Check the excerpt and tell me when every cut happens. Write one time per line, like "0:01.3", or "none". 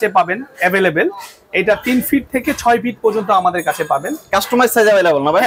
none